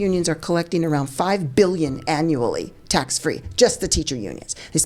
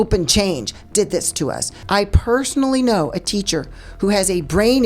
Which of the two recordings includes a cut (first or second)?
second